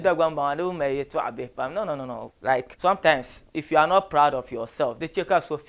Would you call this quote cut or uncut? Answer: cut